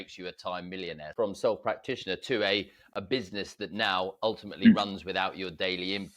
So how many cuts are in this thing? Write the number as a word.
one